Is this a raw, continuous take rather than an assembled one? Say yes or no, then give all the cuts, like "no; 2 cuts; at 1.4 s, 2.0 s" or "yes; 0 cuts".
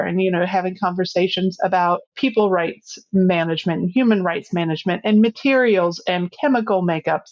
no; 1 cut; at 2.1 s